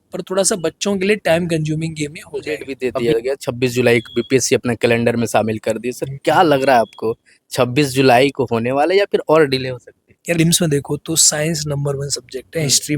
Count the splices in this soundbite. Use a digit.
2